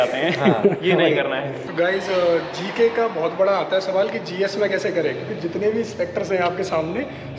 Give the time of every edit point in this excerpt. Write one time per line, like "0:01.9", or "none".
0:01.5